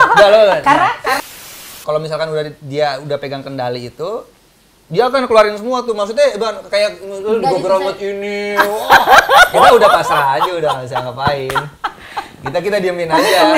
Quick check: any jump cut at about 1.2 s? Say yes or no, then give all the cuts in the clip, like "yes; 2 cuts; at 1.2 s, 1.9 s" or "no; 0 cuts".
yes; 1 cut; at 1.2 s